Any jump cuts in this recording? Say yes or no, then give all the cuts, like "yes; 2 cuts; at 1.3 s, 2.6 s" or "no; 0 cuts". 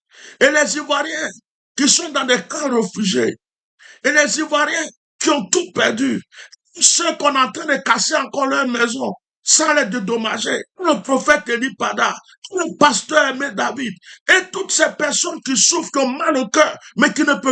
yes; 1 cut; at 10.7 s